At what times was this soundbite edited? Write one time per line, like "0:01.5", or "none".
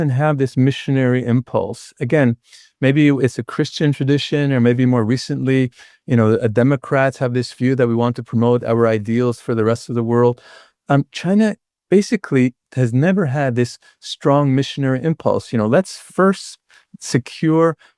none